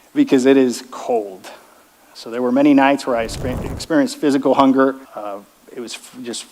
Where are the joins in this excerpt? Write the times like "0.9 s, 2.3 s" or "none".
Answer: 5.0 s